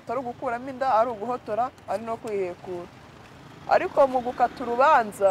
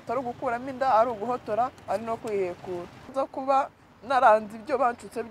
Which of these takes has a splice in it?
second; 1 cut; at 3.1 s

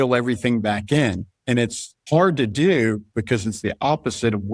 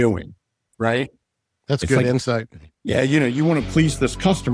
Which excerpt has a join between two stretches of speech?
first; 1 cut; at 1.7 s

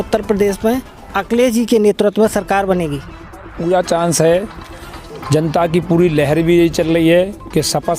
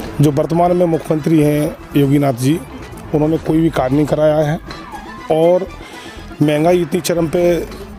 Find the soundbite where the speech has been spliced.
first; 1 cut; at 3.5 s

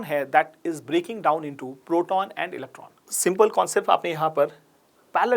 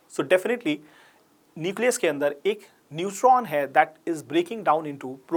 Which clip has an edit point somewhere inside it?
first; 1 cut; at 3.0 s

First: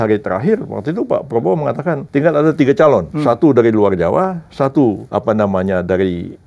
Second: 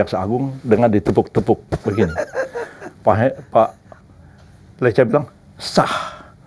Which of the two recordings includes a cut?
first; 3 cuts; at 2.0 s, 3.1 s, 5.0 s

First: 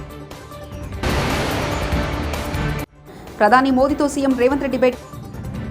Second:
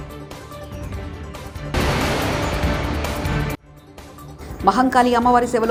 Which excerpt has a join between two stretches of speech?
first; 2 cuts; at 1.0 s, 2.8 s

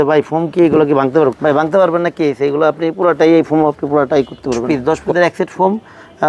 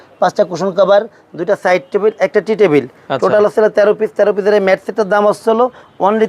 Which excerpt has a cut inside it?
first; 2 cuts; at 1.4 s, 4.6 s

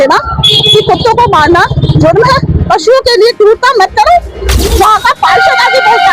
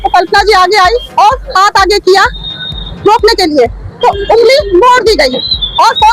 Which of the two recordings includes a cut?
first; 2 cuts; at 2.5 s, 4.8 s

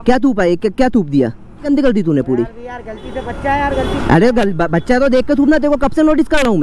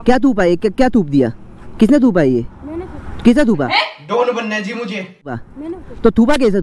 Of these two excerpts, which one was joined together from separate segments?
first; 1 cut; at 1.6 s

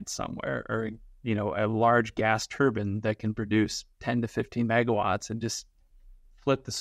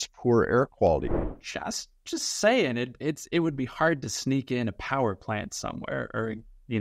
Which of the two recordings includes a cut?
second; 1 cut; at 1.2 s

